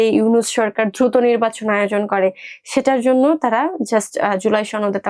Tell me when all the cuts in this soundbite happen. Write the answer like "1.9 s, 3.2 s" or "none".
none